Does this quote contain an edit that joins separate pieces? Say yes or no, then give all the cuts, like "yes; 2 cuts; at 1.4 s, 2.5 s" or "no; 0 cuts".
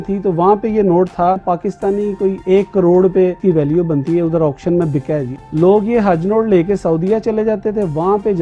yes; 3 cuts; at 1.4 s, 3.4 s, 5.3 s